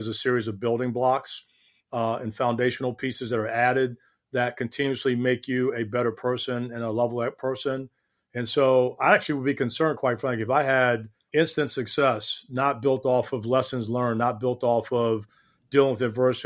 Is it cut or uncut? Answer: uncut